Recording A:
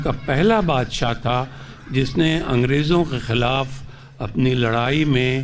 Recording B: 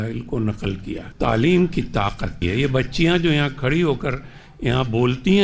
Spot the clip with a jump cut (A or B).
B